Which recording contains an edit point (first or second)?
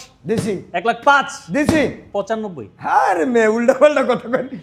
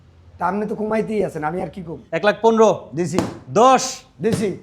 second